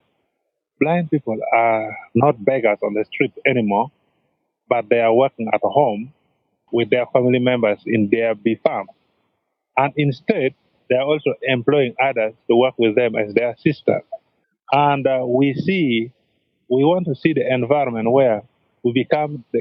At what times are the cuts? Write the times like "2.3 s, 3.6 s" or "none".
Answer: none